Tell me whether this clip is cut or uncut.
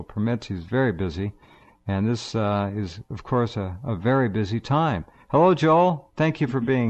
uncut